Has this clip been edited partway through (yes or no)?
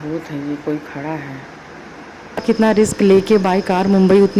yes